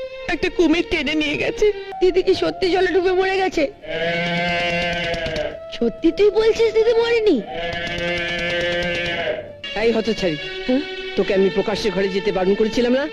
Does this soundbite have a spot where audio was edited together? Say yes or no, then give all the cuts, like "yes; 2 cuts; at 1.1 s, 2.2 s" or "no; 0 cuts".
yes; 2 cuts; at 1.9 s, 9.6 s